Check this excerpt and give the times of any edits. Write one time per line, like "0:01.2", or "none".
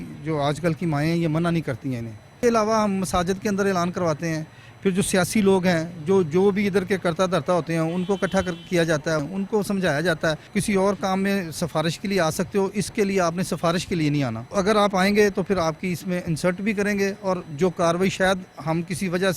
0:02.4
0:09.3
0:10.5
0:14.5
0:17.5